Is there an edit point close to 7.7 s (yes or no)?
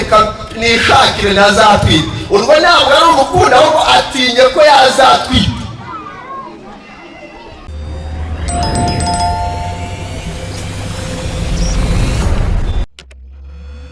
no